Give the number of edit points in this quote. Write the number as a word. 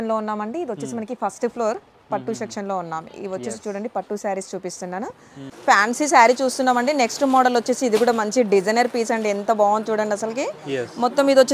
one